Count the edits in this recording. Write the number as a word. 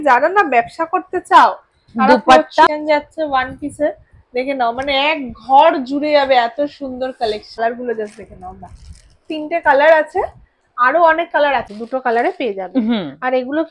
three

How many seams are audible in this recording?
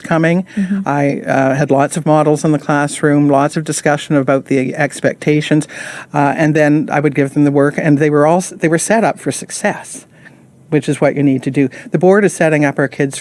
zero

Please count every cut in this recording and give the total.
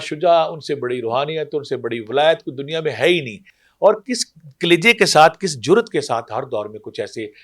zero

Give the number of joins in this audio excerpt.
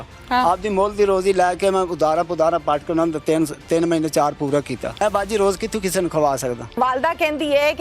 two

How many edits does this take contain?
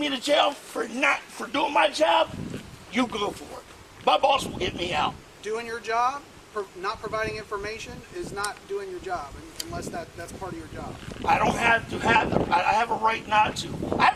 zero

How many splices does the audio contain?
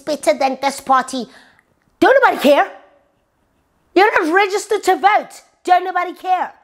zero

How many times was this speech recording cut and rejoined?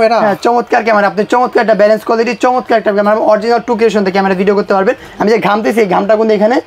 zero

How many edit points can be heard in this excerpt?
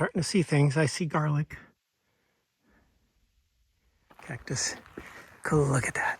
one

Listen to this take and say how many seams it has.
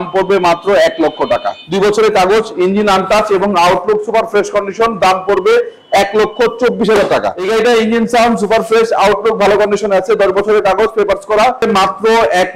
three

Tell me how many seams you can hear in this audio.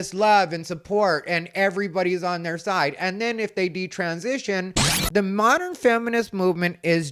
one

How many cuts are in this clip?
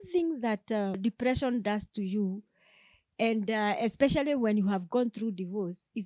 one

